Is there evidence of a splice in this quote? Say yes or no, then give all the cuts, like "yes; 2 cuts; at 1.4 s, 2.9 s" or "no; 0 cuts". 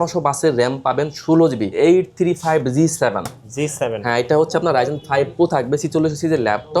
yes; 1 cut; at 1.7 s